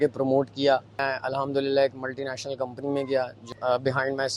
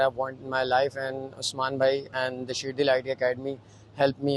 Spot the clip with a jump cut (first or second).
first